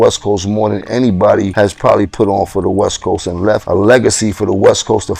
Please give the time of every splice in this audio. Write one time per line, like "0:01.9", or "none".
0:01.5
0:03.6